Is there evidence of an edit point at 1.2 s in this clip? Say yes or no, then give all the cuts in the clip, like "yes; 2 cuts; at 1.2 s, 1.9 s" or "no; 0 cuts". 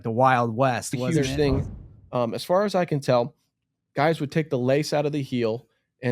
yes; 1 cut; at 1.2 s